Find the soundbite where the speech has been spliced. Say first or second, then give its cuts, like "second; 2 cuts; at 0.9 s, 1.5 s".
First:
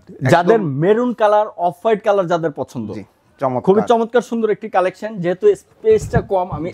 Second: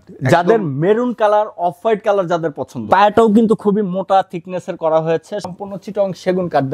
second; 2 cuts; at 2.7 s, 5.5 s